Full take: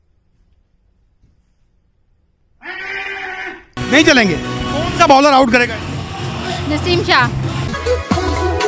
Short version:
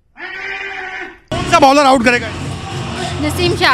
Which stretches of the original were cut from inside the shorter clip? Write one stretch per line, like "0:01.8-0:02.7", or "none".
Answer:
0:03.8-0:04.8

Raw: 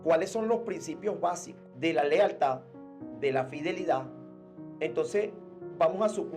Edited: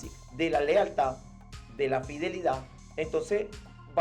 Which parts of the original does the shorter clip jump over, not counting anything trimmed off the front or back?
0:04.2-0:04.6

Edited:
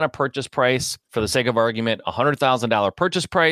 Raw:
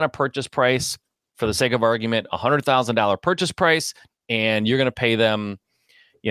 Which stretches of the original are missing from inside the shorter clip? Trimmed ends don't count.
0:01.0-0:01.2

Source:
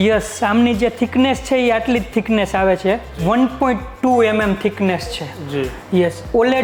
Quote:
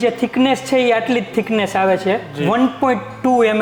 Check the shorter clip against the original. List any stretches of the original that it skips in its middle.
none

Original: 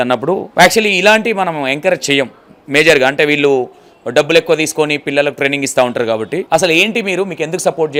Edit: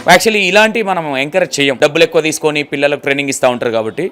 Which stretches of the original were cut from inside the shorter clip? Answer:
0:02.3-0:04.1

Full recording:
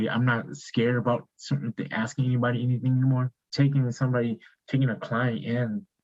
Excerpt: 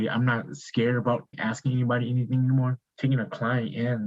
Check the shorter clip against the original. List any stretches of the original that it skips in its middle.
0:01.3-0:01.8
0:03.4-0:04.5

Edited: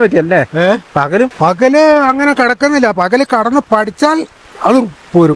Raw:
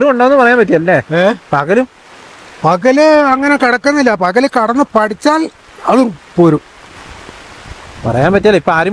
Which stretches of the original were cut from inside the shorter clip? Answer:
0:01.9-0:02.6

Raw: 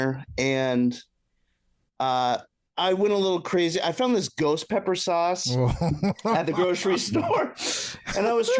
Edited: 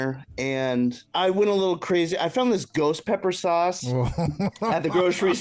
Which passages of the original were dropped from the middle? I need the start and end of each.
0:01.0-0:02.7

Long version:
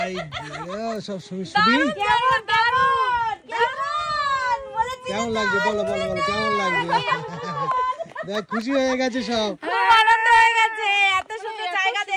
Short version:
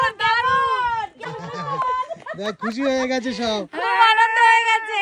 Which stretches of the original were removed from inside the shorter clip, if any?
0:03.6-0:07.2

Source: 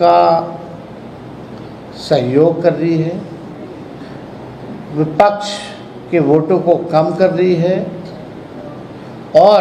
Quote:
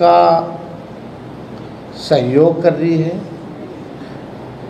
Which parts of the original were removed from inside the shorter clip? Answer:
none

